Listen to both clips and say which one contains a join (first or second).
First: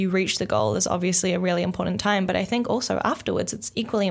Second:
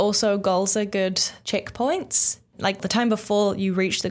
second